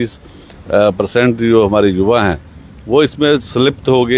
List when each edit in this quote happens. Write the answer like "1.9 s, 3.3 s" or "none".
none